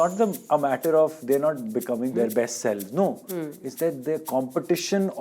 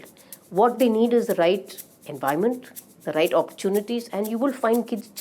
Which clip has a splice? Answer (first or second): first